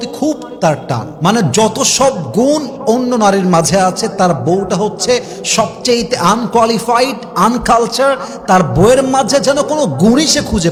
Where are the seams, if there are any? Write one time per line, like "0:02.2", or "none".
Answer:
none